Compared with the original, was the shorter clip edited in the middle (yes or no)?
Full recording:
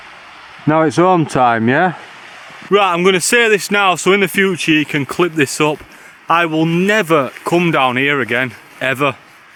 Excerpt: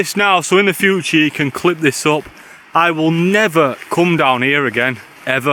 no